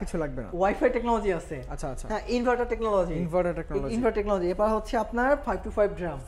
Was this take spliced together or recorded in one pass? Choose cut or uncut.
uncut